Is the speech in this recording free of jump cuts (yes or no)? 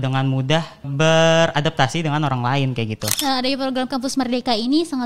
no